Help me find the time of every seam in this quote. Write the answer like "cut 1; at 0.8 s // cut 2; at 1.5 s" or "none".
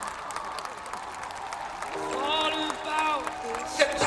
none

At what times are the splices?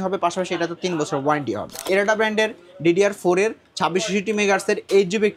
cut 1; at 1.8 s

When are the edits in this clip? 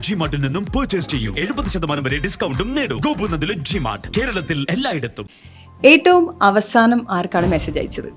cut 1; at 5.6 s

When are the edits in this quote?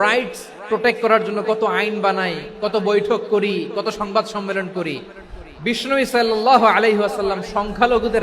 none

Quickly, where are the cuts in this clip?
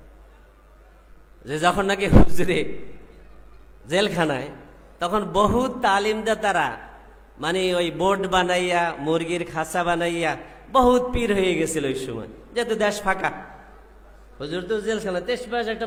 none

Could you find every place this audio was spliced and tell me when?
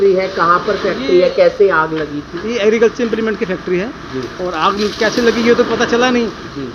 none

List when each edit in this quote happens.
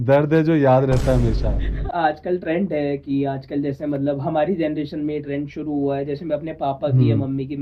cut 1; at 1.8 s

